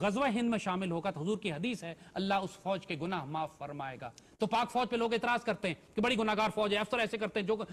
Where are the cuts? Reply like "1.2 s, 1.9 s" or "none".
none

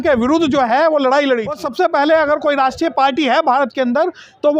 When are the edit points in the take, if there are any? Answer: 1.6 s

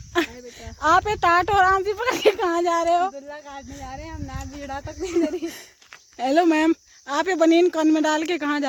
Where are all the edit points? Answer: none

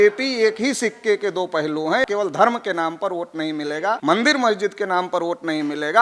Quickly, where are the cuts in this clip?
2.0 s, 4.0 s

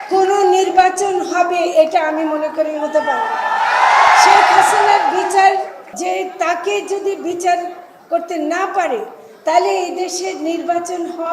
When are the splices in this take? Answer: 5.9 s

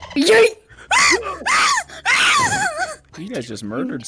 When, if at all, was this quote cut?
3.1 s

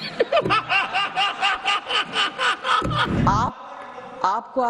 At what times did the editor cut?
3.1 s

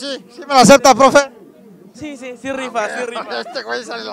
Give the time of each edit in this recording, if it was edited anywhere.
none

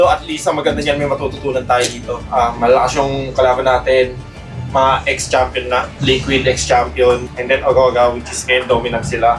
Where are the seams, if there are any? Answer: 5.9 s, 7.3 s

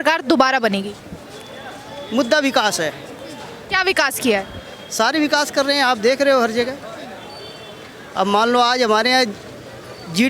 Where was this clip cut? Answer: none

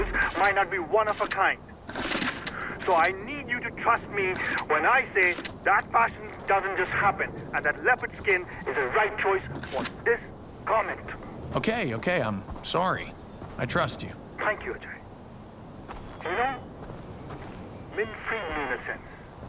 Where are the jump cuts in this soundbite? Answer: 13.7 s

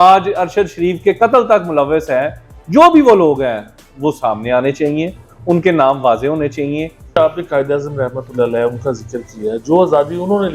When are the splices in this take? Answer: 7.1 s

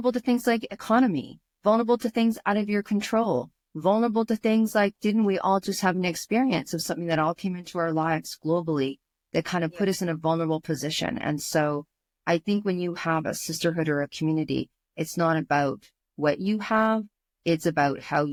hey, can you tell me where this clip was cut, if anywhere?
none

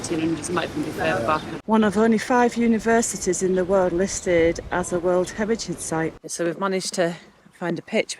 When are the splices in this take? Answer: 1.5 s, 6.2 s

